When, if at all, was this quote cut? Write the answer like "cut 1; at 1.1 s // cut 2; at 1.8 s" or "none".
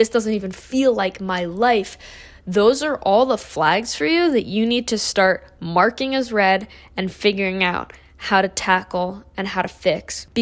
none